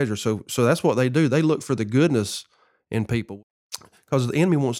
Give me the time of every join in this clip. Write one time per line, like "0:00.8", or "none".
0:03.2